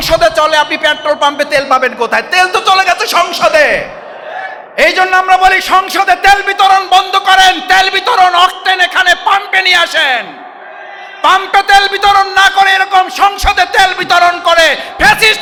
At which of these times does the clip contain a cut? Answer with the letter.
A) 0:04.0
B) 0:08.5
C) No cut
C